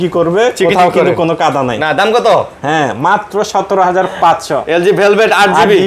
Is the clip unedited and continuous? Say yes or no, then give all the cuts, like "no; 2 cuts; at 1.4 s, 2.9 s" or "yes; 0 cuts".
yes; 0 cuts